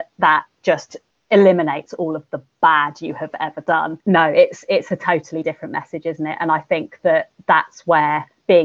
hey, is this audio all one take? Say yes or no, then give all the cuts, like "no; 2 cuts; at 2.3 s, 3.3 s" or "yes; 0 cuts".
no; 1 cut; at 3.9 s